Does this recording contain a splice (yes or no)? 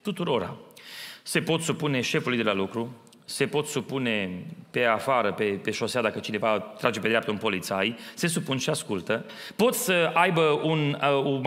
no